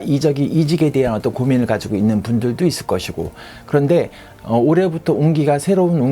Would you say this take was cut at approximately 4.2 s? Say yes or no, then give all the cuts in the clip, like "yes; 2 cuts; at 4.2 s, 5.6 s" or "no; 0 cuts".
yes; 1 cut; at 4.2 s